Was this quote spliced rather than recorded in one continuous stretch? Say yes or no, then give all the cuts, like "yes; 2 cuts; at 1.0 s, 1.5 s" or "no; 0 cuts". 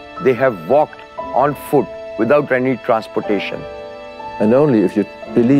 yes; 1 cut; at 4.1 s